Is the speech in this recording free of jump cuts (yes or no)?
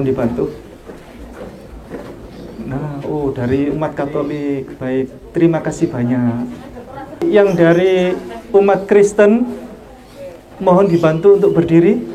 no